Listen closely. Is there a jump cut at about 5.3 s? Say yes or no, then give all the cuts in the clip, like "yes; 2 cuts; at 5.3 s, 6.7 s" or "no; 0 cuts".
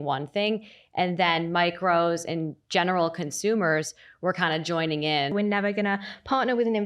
yes; 1 cut; at 5.3 s